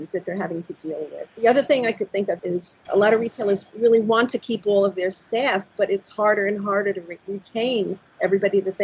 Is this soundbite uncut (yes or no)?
no